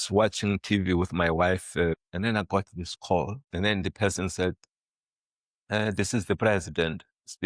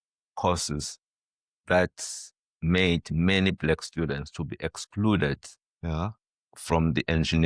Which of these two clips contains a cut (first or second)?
first